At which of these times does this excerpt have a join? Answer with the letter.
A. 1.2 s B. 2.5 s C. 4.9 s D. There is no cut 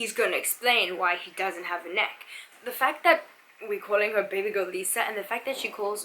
B